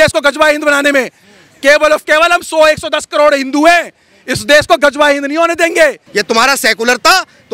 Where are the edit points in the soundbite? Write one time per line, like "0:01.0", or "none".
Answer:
0:06.0

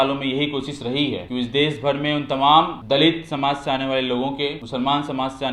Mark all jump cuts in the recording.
0:01.2
0:02.8
0:04.6

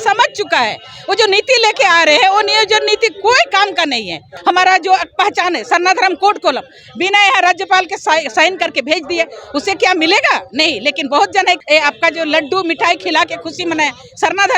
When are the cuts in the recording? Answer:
0:04.3
0:11.6

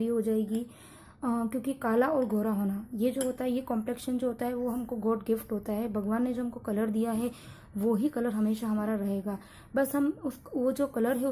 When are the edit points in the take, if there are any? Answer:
none

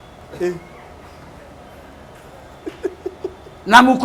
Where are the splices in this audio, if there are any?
none

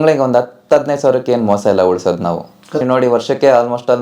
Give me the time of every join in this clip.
0:02.7

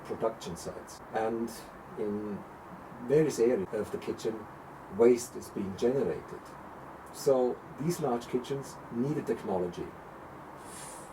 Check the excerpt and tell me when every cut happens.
0:00.9
0:03.7

